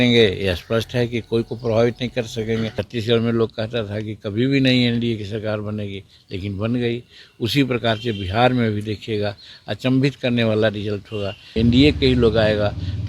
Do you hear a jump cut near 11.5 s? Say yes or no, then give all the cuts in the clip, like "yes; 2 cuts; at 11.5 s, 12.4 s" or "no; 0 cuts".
yes; 2 cuts; at 2.8 s, 11.5 s